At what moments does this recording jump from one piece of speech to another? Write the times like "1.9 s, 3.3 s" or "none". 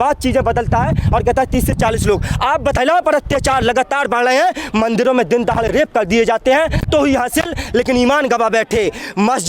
2.8 s, 6.8 s